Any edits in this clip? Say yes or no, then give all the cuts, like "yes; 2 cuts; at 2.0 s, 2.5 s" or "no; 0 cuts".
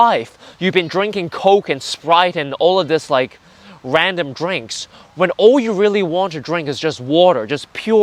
no; 0 cuts